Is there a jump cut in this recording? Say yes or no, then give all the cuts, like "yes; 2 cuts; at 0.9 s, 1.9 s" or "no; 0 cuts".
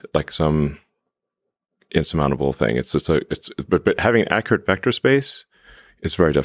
no; 0 cuts